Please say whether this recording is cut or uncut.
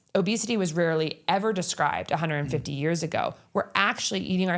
uncut